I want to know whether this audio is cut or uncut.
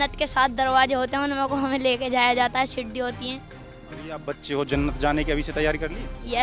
uncut